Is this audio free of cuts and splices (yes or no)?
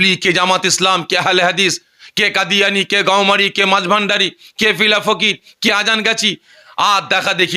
yes